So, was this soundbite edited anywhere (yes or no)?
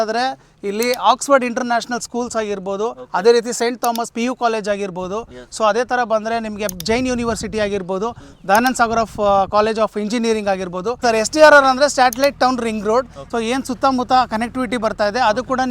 yes